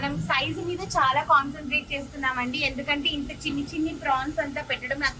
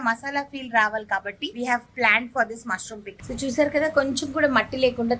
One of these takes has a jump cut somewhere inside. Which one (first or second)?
second